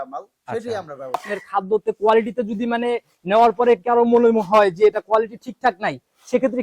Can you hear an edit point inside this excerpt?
yes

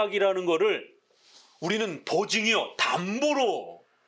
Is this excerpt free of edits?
yes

